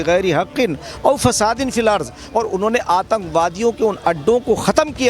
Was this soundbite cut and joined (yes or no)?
yes